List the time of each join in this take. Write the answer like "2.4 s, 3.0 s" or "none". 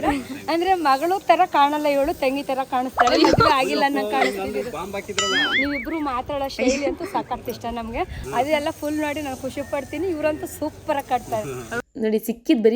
5.5 s, 8.2 s, 11.8 s